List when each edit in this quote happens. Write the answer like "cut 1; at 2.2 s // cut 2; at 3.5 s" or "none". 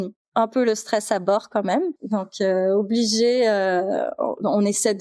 cut 1; at 2.0 s